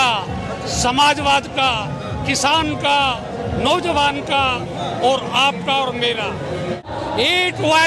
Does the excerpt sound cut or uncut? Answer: cut